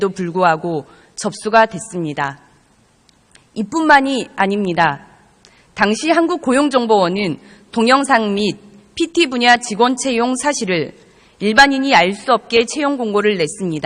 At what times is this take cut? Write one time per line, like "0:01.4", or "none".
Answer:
0:10.7